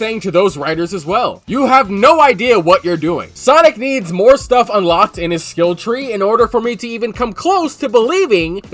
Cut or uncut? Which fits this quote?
cut